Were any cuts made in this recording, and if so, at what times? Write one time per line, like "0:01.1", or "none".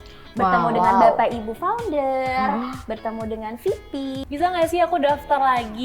0:04.2

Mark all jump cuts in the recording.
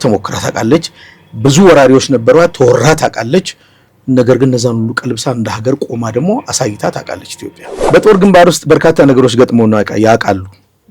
0:07.7

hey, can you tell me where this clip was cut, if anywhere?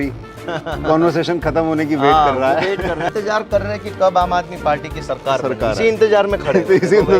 0:03.1

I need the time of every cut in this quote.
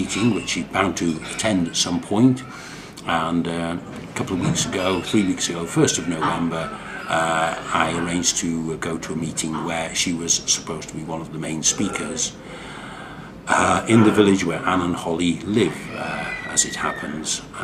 0:04.1

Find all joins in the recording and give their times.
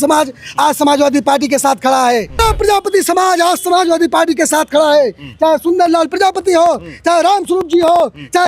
0:02.4

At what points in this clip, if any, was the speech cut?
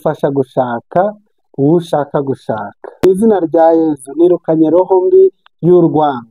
0:03.0

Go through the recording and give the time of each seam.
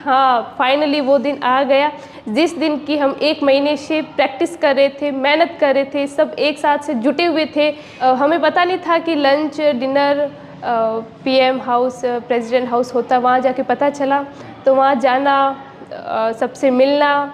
0:07.9

